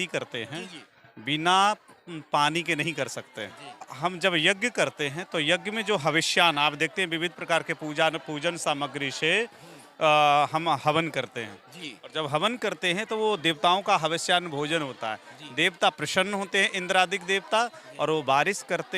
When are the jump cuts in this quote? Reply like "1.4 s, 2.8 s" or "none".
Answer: 3.9 s